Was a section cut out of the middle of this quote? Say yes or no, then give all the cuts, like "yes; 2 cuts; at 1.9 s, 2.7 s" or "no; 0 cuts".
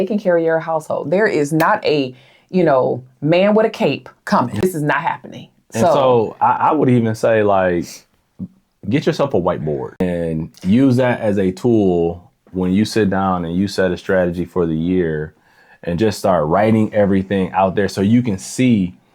yes; 2 cuts; at 4.6 s, 10.0 s